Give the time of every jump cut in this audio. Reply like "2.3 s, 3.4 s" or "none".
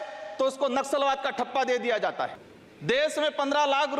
2.3 s